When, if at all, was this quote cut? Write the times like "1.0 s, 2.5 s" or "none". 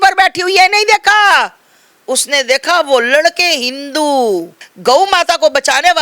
4.6 s